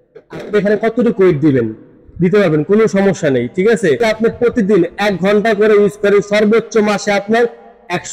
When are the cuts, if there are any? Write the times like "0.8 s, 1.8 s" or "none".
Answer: 4.0 s

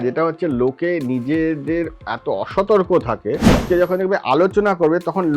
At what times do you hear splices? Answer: 3.7 s

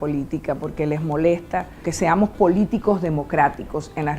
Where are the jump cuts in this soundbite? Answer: 1.8 s

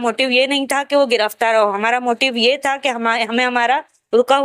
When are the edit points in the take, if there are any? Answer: none

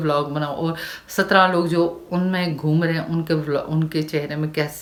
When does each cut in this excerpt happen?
none

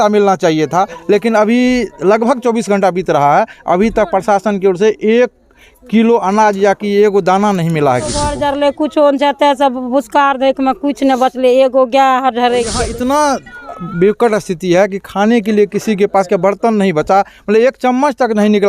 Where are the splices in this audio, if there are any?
8.3 s, 12.9 s

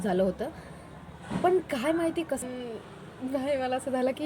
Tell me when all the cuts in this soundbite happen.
2.4 s

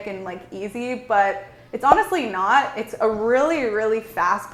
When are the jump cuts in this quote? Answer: none

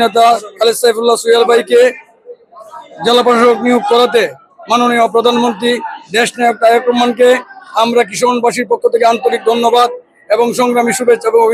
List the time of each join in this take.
none

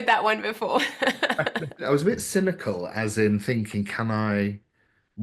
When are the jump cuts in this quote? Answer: 1.9 s

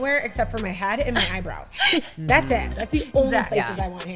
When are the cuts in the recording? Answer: none

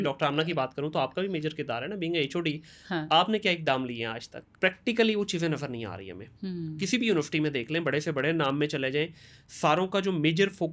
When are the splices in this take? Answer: 4.4 s

